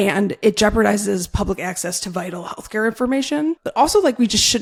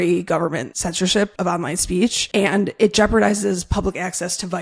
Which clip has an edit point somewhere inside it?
second; 1 cut; at 1.1 s

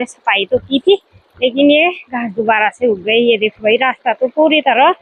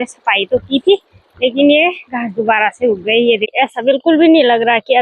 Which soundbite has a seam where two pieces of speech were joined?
second; 1 cut; at 3.5 s

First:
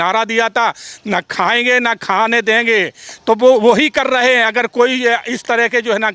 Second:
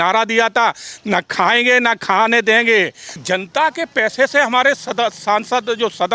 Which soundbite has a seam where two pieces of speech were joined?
second; 1 cut; at 3.1 s

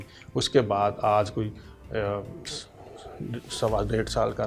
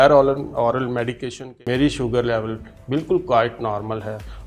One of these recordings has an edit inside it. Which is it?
second; 1 cut; at 1.4 s

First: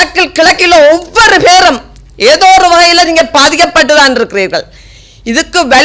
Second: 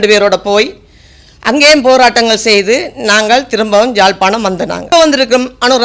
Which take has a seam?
second; 1 cut; at 4.9 s

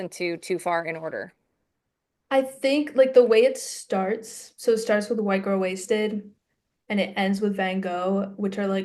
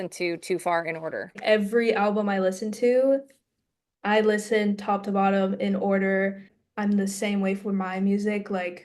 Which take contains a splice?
second; 2 cuts; at 1.4 s, 6.5 s

